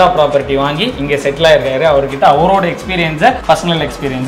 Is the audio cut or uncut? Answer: uncut